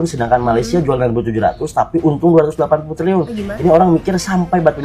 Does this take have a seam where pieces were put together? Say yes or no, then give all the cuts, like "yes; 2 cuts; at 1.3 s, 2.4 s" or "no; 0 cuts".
no; 0 cuts